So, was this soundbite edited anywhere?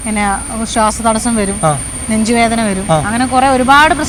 no; 0 cuts

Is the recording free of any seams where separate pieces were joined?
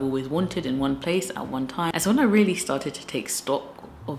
no; 1 cut; at 1.9 s

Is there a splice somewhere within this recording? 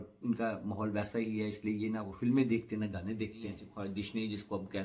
yes; 1 cut; at 3.7 s

